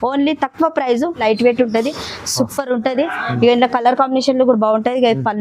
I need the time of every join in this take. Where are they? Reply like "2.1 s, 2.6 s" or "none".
1.2 s